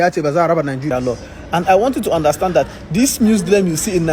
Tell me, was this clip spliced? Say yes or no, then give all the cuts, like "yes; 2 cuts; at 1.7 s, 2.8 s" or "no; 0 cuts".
yes; 1 cut; at 0.9 s